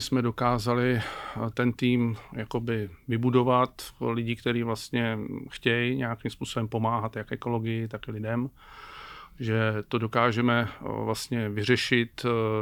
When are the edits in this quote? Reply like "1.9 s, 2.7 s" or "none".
none

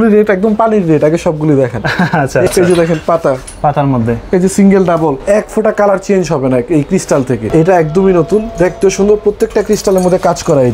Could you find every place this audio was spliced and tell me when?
2.5 s, 5.2 s, 7.5 s

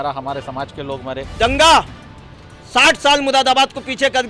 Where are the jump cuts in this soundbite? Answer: 1.3 s

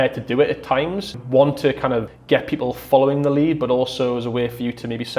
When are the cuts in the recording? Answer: 1.2 s, 2.1 s

